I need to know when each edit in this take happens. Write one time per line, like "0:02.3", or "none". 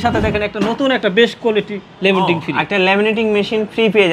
none